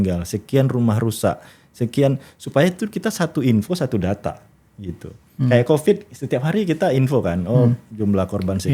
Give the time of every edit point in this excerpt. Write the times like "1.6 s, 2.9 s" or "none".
none